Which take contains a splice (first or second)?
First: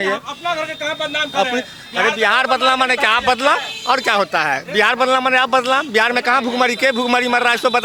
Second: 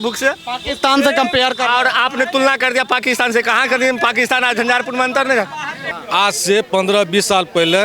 second